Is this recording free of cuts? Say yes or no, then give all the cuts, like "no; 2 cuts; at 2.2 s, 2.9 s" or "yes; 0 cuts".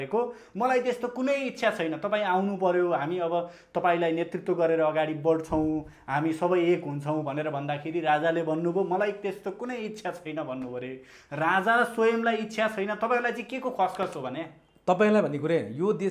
yes; 0 cuts